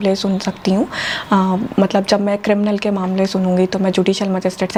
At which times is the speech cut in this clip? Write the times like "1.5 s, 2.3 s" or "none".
none